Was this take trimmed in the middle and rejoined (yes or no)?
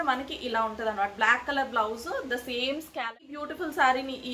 yes